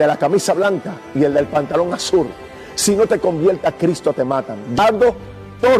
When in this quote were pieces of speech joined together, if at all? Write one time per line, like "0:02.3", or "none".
0:04.8